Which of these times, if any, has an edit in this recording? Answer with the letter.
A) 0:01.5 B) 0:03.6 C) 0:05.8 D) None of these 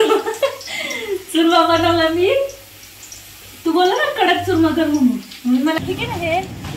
C